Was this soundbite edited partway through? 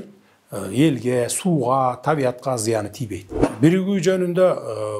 yes; 1 cut; at 3.4 s

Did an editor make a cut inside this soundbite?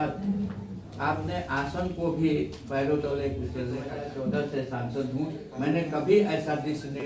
yes; 1 cut; at 4.0 s

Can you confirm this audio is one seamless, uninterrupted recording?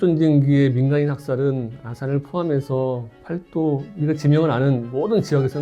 no; 1 cut; at 3.2 s

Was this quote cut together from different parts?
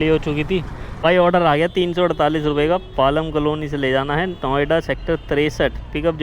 yes; 1 cut; at 1.0 s

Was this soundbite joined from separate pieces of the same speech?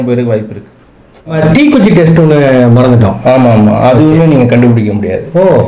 yes; 1 cut; at 1.4 s

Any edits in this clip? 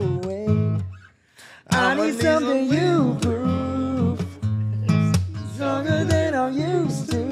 no; 0 cuts

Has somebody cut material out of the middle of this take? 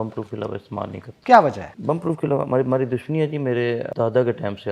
yes; 3 cuts; at 1.1 s, 1.7 s, 3.9 s

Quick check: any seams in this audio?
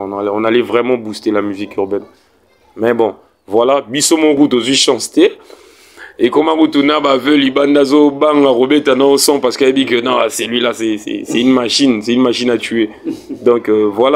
no; 0 cuts

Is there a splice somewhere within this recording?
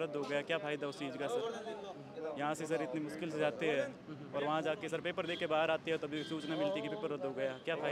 no; 0 cuts

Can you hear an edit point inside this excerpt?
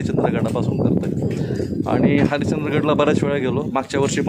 no; 0 cuts

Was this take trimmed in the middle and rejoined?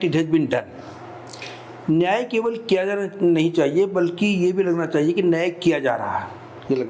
no; 0 cuts

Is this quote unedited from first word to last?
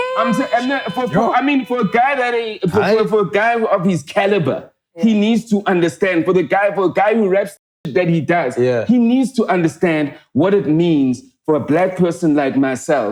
yes; 0 cuts

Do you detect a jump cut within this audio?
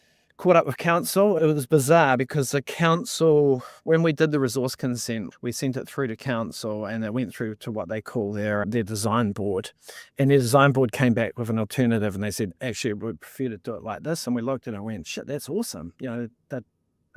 yes; 3 cuts; at 1.4 s, 5.3 s, 8.6 s

